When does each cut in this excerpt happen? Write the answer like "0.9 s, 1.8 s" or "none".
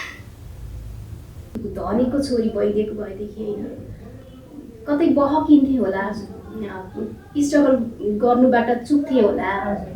1.5 s